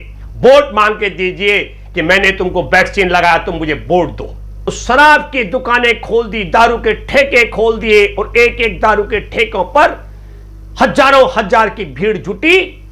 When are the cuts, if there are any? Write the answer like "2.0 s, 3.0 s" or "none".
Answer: 4.8 s